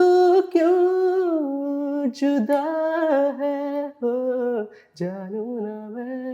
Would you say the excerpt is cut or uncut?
uncut